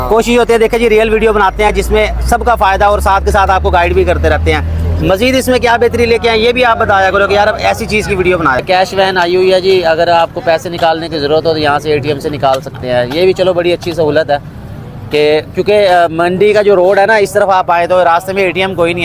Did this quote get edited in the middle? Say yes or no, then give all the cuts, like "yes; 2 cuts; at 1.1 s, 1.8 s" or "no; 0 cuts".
yes; 1 cut; at 8.6 s